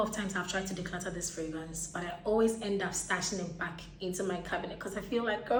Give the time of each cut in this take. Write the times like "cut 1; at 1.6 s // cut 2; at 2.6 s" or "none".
none